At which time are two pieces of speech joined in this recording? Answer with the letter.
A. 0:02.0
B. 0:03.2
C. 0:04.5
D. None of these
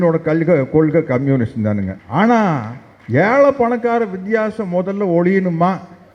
A